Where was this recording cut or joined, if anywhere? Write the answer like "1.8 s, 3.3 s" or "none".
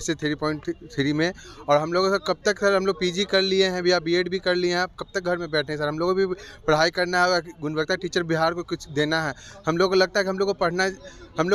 none